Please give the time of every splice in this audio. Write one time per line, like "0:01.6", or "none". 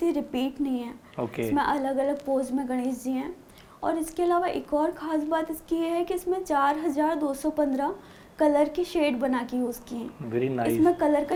none